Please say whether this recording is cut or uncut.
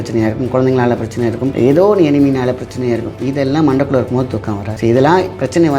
cut